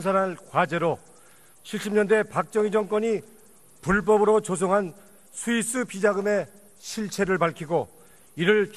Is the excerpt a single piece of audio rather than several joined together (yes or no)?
yes